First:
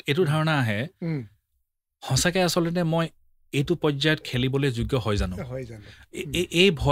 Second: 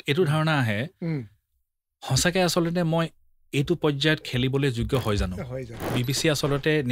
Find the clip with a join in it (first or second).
second